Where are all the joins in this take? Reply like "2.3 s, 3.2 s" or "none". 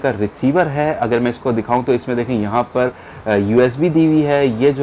none